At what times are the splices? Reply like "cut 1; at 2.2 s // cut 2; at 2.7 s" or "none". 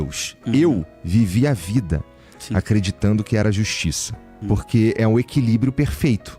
cut 1; at 4.4 s